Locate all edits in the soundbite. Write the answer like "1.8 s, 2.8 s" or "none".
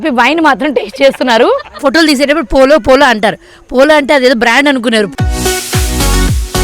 1.8 s, 5.1 s